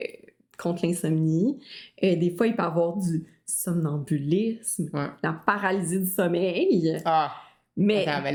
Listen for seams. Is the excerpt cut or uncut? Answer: uncut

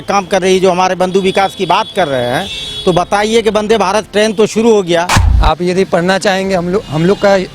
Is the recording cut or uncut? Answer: cut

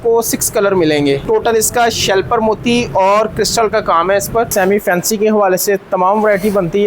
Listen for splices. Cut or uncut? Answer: cut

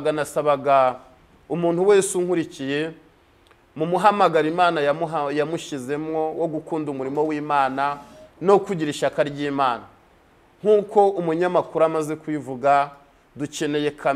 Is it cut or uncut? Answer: uncut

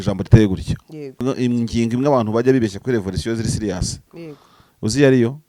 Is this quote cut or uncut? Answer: cut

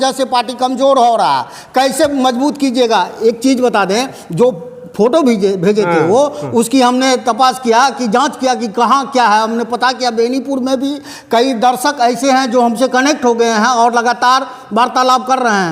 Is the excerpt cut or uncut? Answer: uncut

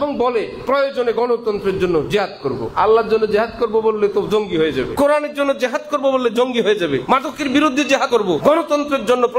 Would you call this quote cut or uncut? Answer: cut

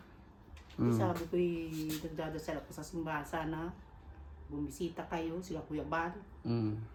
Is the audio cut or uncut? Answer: uncut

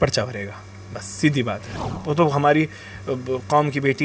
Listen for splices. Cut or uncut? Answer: cut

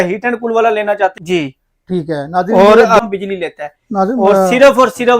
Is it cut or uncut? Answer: cut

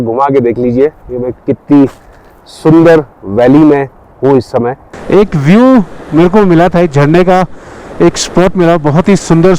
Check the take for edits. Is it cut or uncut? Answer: cut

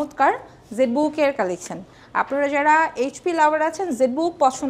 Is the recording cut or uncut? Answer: uncut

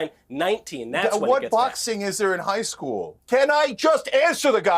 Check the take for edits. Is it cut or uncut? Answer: cut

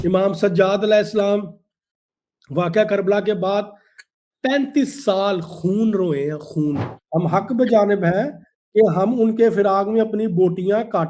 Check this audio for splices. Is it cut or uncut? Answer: cut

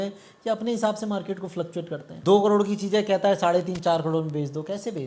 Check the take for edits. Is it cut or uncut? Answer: cut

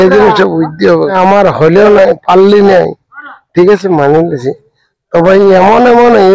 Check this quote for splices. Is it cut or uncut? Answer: uncut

